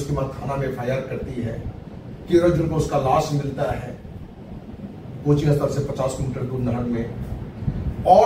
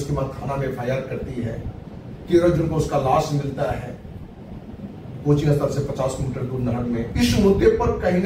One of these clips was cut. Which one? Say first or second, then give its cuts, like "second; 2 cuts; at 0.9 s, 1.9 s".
second; 1 cut; at 7.1 s